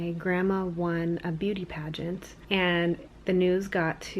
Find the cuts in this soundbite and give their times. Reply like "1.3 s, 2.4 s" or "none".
2.3 s